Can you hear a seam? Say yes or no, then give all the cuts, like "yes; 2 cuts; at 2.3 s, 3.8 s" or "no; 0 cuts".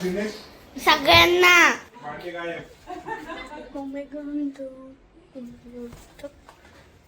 yes; 1 cut; at 1.9 s